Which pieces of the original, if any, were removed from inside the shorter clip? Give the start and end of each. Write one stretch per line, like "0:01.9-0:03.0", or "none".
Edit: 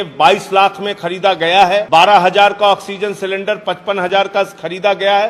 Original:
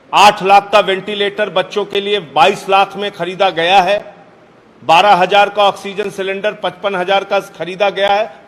0:04.0-0:04.8